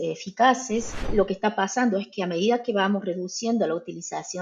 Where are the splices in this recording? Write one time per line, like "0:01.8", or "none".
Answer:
0:01.1